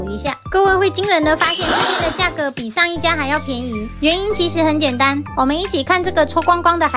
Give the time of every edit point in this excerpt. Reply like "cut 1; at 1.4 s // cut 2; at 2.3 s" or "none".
none